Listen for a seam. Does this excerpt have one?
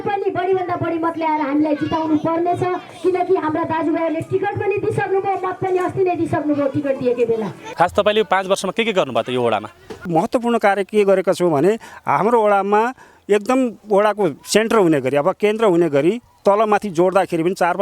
yes; 2 cuts; at 7.6 s, 10.1 s

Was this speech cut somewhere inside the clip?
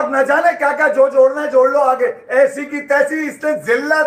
no; 0 cuts

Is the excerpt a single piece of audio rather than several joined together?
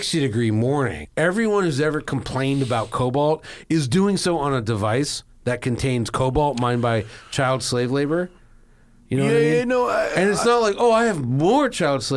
no; 1 cut; at 1.0 s

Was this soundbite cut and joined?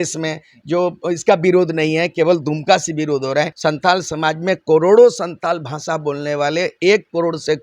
yes; 1 cut; at 3.5 s

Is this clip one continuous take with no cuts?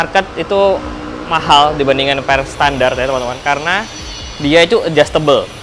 yes; 0 cuts

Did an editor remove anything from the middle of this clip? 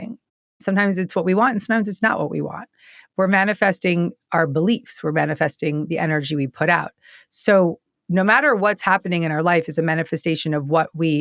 no; 0 cuts

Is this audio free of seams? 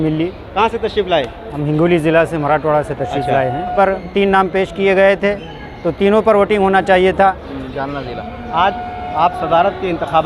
no; 2 cuts; at 3.7 s, 7.5 s

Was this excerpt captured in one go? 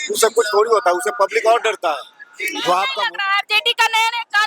no; 1 cut; at 2.9 s

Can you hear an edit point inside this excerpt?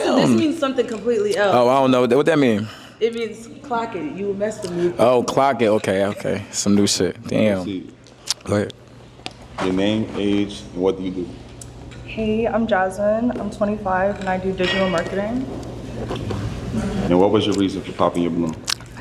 no; 0 cuts

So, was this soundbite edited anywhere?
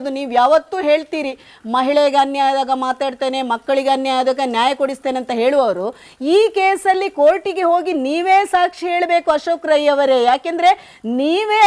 no; 0 cuts

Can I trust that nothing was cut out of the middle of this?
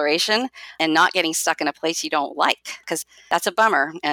no; 2 cuts; at 0.8 s, 2.8 s

